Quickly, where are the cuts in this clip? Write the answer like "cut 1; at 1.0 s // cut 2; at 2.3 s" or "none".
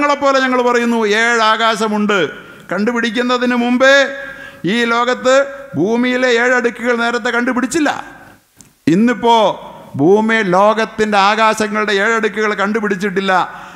none